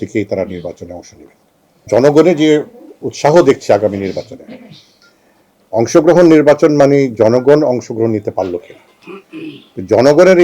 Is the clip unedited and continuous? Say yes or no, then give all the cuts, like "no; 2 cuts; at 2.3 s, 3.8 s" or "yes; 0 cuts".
no; 1 cut; at 1.8 s